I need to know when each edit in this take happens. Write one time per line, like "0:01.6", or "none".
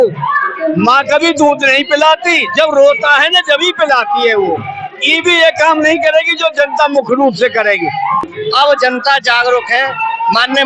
0:08.3